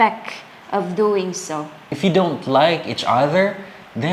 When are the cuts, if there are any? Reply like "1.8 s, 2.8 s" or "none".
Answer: 1.9 s